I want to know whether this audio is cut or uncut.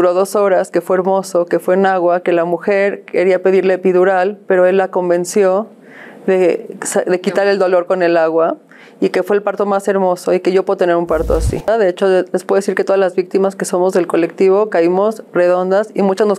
cut